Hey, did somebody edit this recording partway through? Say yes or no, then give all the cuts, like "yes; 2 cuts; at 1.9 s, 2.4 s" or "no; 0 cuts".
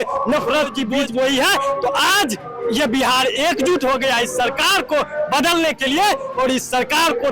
yes; 1 cut; at 1.0 s